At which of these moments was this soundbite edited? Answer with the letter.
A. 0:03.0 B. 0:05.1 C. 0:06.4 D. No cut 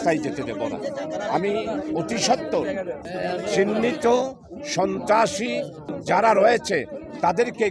A